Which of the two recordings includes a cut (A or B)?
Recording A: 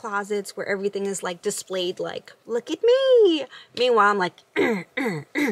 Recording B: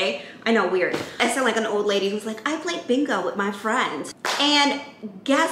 B